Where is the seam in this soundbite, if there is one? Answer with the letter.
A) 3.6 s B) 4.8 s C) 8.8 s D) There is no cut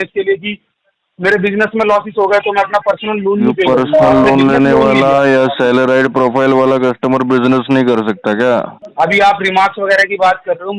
C